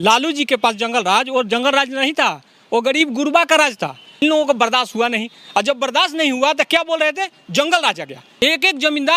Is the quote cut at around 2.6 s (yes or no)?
no